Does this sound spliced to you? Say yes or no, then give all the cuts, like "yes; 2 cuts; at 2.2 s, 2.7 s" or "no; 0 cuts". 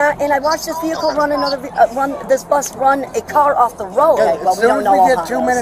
yes; 1 cut; at 4.2 s